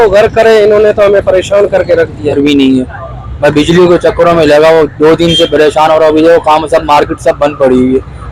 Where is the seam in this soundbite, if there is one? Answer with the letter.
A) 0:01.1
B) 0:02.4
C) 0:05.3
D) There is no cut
B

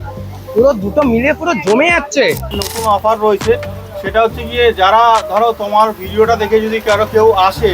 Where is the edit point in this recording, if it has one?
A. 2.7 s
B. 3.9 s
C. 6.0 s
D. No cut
A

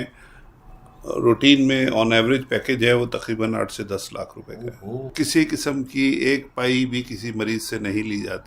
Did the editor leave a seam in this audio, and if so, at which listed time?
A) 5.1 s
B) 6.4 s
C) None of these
A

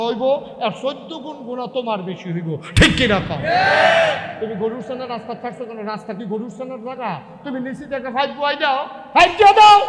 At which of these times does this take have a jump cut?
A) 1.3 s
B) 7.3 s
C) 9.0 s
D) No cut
C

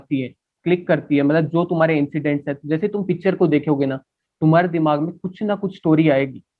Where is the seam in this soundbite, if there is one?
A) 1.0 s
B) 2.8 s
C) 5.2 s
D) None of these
D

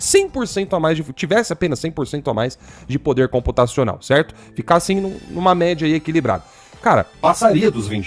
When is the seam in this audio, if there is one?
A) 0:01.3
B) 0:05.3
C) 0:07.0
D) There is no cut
D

